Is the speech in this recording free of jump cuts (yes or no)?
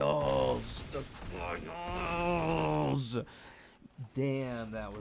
yes